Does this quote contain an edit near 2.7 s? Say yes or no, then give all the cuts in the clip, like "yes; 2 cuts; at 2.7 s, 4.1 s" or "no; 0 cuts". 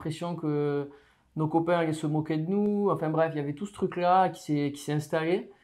no; 0 cuts